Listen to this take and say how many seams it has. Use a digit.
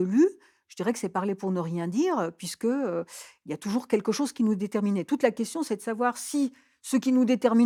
0